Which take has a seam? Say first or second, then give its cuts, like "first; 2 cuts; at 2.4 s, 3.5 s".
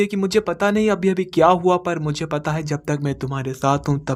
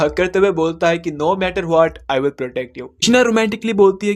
second; 1 cut; at 2.9 s